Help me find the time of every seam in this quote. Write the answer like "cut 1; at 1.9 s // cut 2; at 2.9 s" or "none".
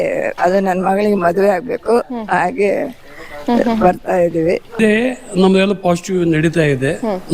cut 1; at 4.8 s